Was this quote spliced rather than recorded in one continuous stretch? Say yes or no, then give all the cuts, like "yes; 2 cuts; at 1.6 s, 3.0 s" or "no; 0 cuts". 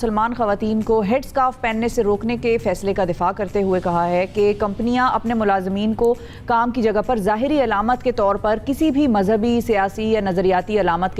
no; 0 cuts